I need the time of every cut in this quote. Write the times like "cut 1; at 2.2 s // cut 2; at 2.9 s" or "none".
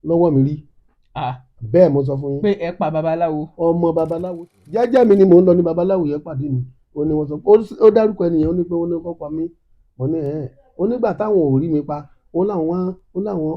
cut 1; at 4.2 s